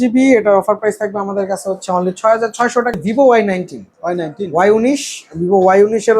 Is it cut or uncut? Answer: cut